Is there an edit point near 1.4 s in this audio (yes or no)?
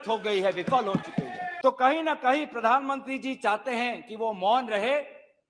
yes